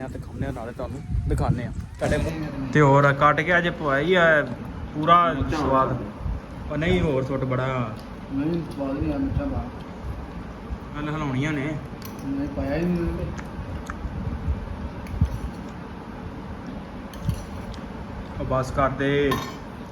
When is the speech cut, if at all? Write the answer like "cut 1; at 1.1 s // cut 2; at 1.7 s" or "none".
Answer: cut 1; at 2.2 s

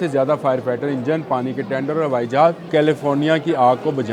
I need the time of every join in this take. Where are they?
cut 1; at 2.7 s

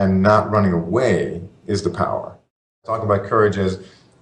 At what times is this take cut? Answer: cut 1; at 3.0 s

